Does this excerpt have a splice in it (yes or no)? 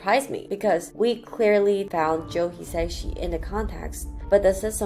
no